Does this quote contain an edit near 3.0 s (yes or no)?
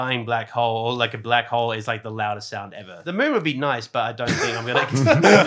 yes